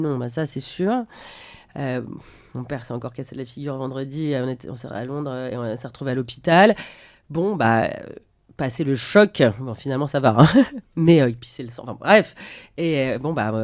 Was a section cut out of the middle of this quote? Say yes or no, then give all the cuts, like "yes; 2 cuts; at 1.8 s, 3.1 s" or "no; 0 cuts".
no; 0 cuts